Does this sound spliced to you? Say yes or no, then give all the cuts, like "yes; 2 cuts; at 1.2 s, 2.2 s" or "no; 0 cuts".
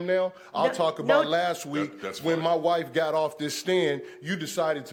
no; 0 cuts